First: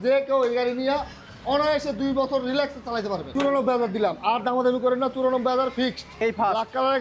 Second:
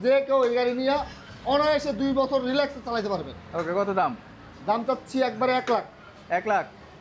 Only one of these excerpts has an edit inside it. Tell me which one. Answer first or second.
first